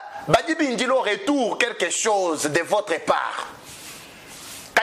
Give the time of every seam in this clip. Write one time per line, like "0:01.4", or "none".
none